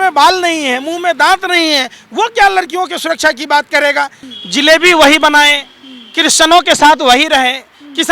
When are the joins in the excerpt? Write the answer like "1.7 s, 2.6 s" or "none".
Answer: 4.2 s